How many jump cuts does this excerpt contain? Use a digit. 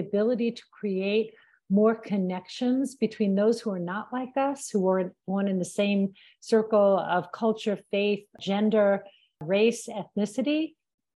1